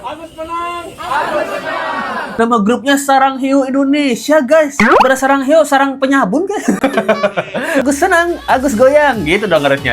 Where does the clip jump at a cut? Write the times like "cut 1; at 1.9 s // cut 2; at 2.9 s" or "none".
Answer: cut 1; at 2.2 s // cut 2; at 7.8 s